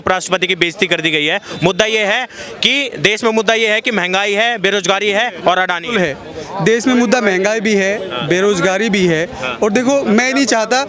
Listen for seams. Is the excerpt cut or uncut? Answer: uncut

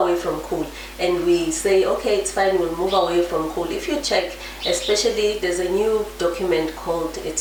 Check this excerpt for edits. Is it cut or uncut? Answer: uncut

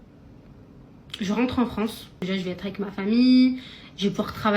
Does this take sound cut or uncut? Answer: cut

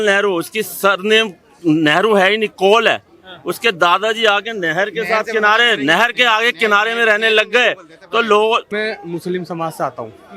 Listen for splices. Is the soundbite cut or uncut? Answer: cut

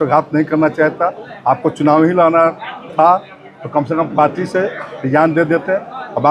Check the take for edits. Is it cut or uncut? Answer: uncut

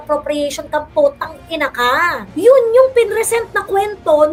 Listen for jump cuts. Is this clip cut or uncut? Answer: uncut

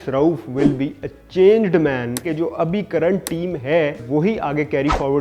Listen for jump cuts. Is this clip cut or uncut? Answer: cut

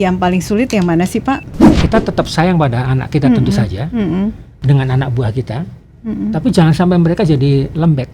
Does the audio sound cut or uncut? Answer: cut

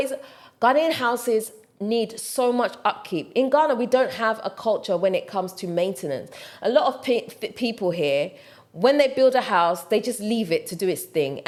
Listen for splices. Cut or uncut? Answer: uncut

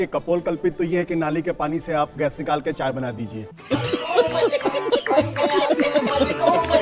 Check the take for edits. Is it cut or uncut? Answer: uncut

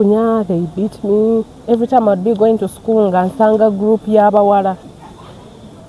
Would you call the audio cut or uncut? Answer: cut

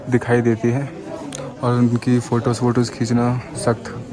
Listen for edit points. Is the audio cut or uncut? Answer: uncut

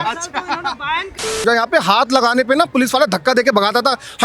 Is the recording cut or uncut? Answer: cut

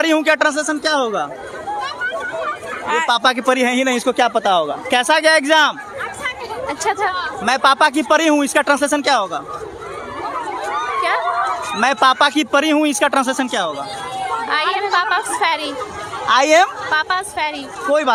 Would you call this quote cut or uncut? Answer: uncut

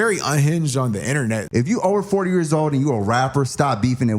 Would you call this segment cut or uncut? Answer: cut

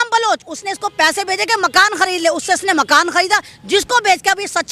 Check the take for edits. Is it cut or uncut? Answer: uncut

